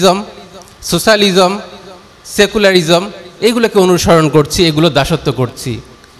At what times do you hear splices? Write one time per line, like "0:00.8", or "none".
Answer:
none